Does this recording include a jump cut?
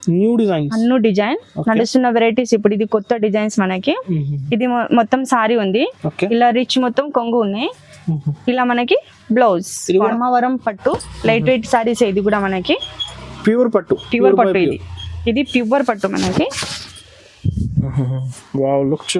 yes; 1 cut; at 10.1 s

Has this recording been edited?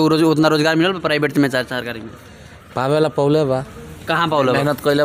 no; 0 cuts

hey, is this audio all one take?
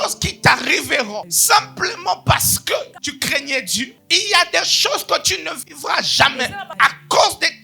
no; 4 cuts; at 1.3 s, 3.0 s, 3.9 s, 6.7 s

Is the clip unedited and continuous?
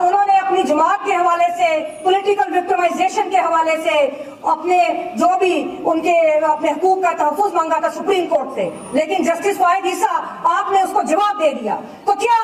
yes; 0 cuts

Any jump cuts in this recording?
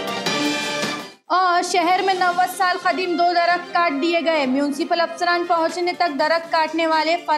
no; 0 cuts

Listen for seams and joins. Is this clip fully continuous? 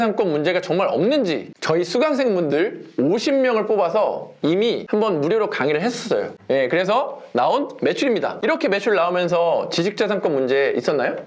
yes; 0 cuts

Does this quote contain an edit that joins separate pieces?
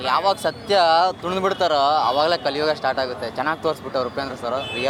no; 0 cuts

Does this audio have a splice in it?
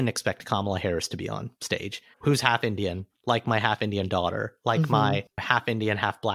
yes; 2 cuts; at 1.6 s, 5.3 s

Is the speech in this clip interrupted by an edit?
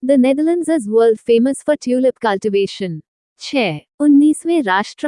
yes; 1 cut; at 3.5 s

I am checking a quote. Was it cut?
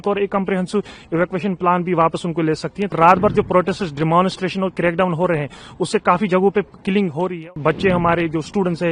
yes; 2 cuts; at 2.9 s, 7.5 s

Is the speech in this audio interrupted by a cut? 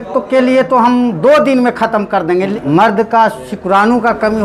yes; 1 cut; at 2.5 s

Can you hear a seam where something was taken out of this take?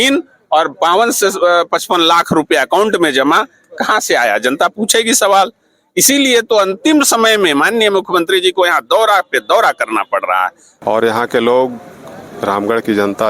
yes; 1 cut; at 10.6 s

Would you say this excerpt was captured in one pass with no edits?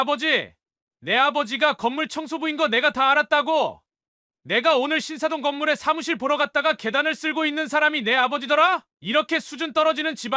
no; 1 cut; at 8.9 s

